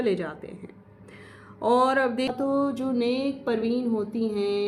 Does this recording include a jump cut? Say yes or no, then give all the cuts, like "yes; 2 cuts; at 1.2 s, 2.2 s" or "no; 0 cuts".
yes; 1 cut; at 2.3 s